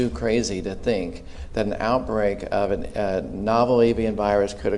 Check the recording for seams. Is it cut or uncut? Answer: uncut